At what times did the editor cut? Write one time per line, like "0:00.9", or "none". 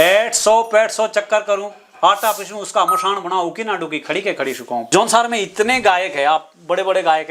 0:04.9